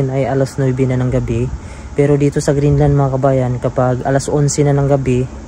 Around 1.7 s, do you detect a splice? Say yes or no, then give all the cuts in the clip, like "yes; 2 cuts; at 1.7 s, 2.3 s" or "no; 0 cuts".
no; 0 cuts